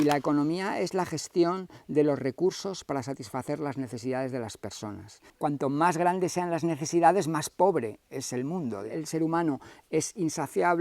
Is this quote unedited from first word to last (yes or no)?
no